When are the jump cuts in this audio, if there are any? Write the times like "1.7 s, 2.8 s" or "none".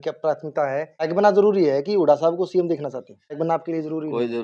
1.1 s, 3.4 s